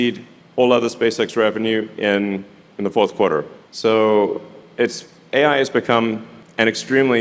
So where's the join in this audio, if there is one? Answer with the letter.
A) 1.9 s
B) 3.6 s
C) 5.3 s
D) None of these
D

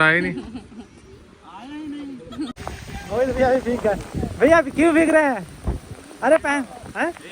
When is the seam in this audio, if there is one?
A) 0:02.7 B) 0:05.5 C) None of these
A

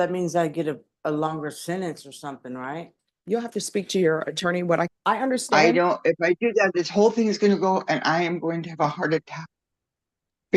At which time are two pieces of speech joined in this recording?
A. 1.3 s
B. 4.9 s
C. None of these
B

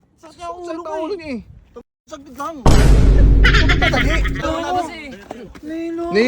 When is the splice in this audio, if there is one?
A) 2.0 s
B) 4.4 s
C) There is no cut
B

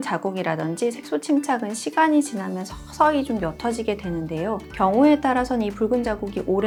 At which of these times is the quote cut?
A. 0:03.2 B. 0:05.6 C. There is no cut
C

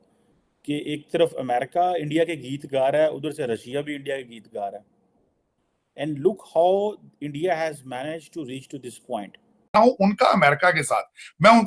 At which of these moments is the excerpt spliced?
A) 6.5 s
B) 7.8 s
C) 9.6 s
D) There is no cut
C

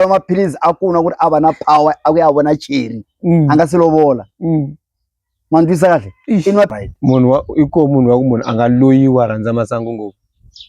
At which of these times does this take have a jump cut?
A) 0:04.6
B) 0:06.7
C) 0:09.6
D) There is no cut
B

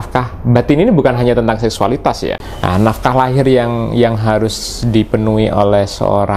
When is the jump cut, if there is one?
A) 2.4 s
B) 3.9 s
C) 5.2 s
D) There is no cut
A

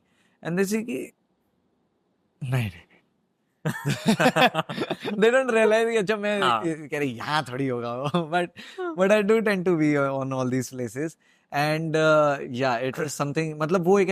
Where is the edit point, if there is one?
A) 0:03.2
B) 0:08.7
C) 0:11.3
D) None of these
D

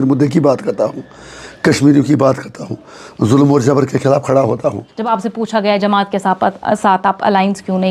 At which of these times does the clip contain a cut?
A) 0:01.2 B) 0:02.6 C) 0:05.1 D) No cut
C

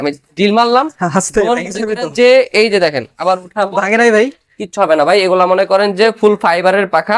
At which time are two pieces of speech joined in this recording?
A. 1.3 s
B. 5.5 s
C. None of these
C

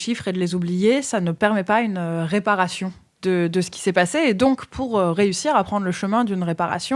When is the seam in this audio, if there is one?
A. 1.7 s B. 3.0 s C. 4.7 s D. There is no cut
C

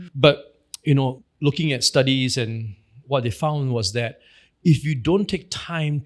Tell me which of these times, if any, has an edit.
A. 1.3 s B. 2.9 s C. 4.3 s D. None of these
A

